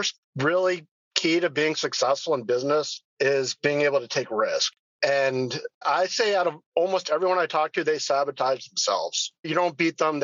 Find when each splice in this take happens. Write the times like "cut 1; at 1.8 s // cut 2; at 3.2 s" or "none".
none